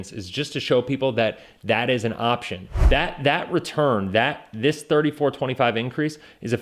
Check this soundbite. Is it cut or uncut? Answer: cut